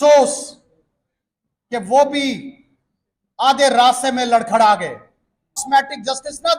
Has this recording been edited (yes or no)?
yes